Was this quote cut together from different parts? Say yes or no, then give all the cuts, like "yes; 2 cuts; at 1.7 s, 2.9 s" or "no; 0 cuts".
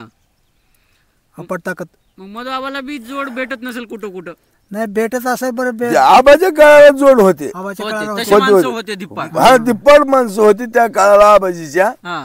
no; 0 cuts